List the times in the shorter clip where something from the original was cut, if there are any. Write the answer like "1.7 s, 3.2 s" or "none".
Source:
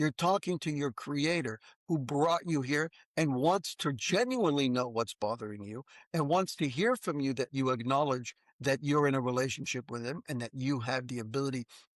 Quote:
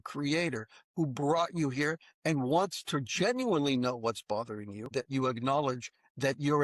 4.9 s